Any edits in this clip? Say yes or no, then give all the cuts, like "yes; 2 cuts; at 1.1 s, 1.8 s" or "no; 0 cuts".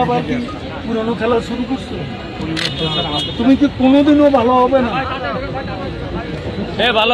no; 0 cuts